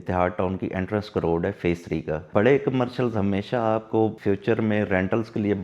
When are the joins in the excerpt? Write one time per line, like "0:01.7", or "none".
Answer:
0:02.2
0:04.2